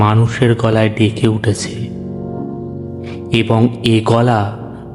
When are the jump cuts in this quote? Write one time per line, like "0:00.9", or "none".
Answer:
0:01.8
0:03.2